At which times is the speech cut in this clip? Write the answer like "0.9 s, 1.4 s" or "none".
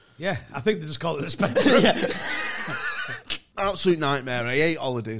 3.4 s